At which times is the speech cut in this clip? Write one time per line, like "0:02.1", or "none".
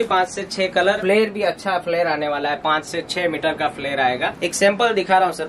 0:01.0
0:04.4